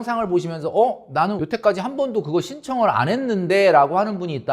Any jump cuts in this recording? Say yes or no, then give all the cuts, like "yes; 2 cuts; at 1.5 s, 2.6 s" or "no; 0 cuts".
yes; 1 cut; at 1.4 s